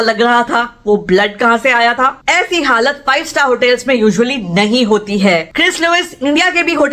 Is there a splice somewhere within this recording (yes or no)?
no